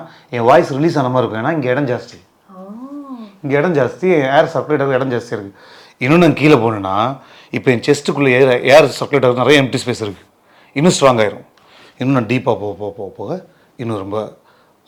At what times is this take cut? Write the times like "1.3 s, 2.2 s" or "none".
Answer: none